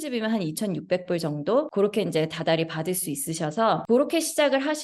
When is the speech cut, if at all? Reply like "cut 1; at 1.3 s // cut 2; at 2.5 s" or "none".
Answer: cut 1; at 1.7 s // cut 2; at 3.8 s